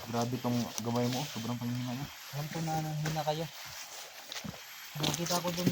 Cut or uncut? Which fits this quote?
uncut